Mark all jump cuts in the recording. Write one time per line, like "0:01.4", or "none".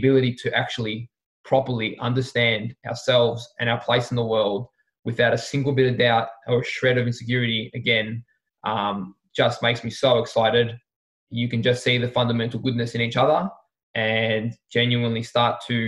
0:11.2